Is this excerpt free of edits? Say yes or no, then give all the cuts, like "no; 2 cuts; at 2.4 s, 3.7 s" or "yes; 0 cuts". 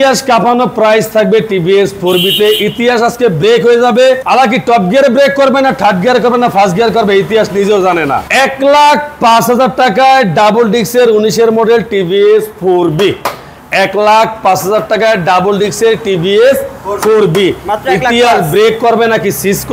yes; 0 cuts